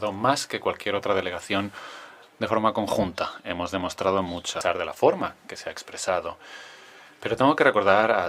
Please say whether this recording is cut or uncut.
cut